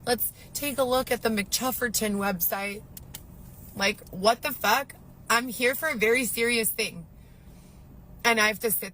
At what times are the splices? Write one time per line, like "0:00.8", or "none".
0:03.8